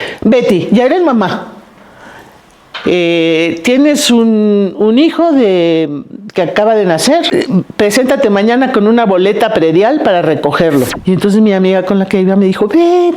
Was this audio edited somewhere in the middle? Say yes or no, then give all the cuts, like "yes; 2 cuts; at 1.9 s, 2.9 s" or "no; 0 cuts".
yes; 2 cuts; at 7.3 s, 11.0 s